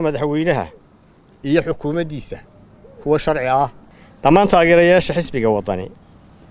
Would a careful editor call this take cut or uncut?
cut